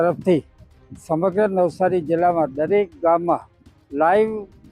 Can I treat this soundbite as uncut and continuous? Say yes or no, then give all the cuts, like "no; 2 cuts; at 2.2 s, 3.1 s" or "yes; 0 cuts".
yes; 0 cuts